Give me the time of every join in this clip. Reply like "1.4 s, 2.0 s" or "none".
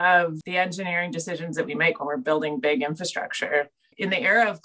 none